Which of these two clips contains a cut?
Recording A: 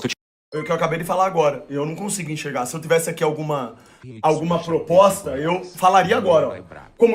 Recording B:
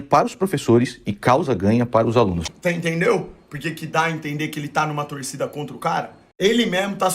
B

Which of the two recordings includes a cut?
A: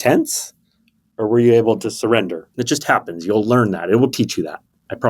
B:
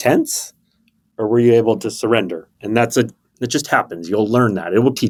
A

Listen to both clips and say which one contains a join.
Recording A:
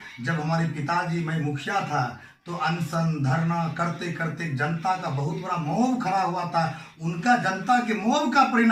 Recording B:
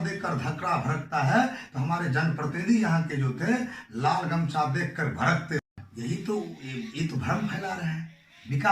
B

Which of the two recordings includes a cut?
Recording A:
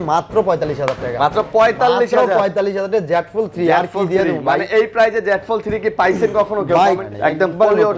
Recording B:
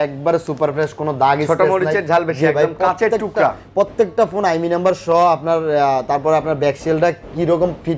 A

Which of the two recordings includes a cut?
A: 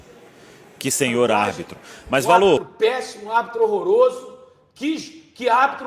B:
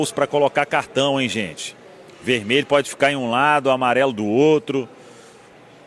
A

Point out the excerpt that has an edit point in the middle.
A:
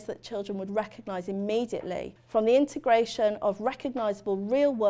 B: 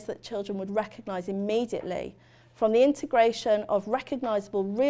A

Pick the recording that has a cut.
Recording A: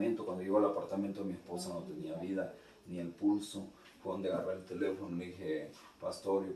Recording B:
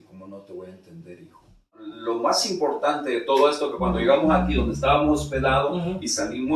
B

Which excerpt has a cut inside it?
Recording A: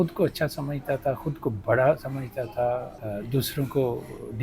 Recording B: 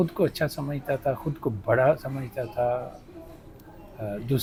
A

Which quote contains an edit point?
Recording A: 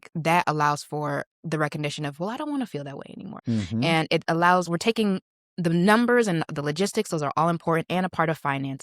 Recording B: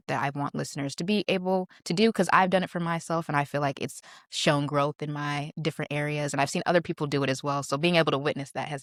A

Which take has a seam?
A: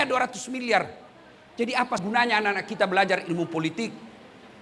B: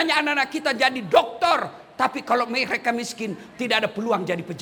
A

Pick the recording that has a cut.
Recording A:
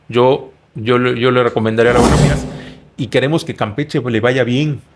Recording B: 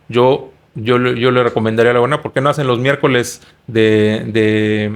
A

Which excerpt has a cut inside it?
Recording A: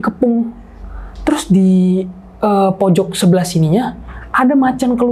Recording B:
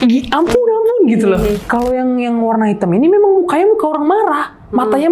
B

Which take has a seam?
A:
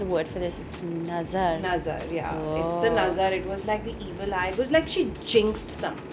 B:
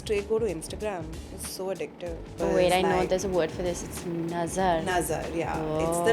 B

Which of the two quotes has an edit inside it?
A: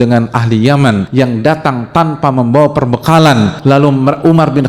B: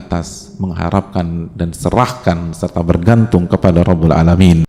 A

